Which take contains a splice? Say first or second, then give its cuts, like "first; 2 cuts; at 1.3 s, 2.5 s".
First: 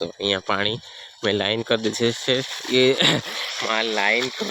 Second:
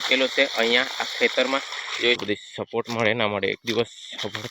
second; 1 cut; at 2.2 s